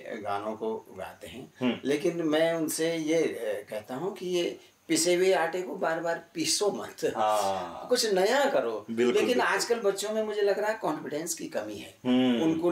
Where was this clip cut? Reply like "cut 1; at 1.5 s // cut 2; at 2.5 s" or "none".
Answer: none